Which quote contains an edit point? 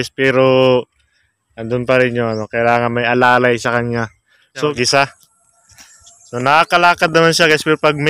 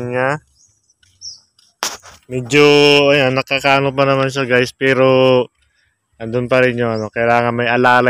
first; 1 cut; at 4.7 s

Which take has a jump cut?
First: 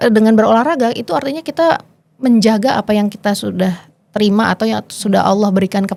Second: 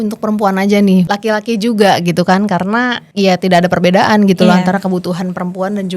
second; 2 cuts; at 1.1 s, 3.0 s

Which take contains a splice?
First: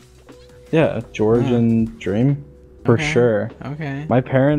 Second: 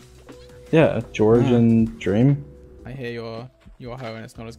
second; 1 cut; at 2.8 s

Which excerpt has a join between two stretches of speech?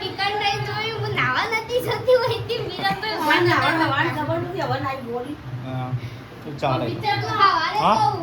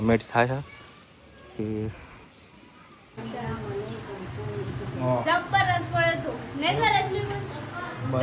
second; 1 cut; at 3.2 s

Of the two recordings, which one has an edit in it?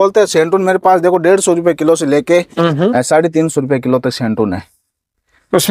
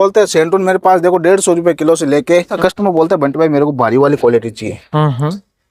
second; 1 cut; at 2.5 s

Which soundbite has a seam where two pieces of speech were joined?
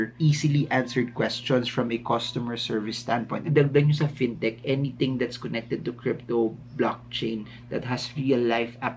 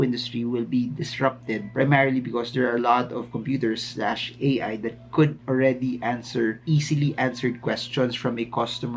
first; 1 cut; at 3.4 s

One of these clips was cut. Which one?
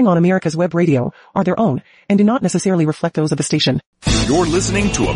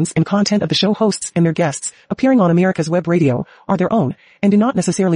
first; 1 cut; at 3.9 s

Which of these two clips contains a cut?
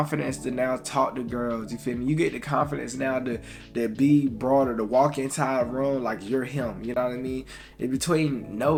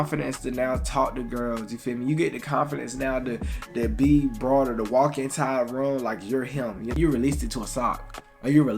second; 1 cut; at 6.9 s

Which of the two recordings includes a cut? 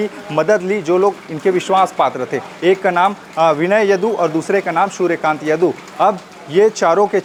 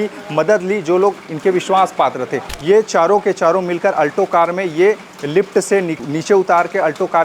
second; 2 cuts; at 2.5 s, 5.9 s

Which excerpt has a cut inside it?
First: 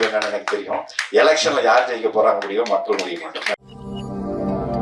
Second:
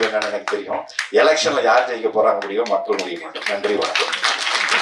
first; 1 cut; at 3.6 s

